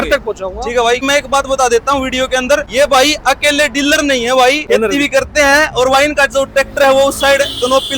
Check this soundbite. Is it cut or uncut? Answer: cut